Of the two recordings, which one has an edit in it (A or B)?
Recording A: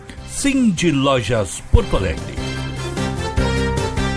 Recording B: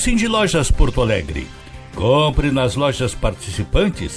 A